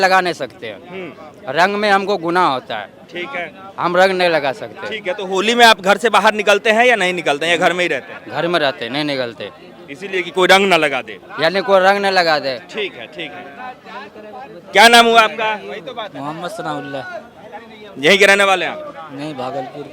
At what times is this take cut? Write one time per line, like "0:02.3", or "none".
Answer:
none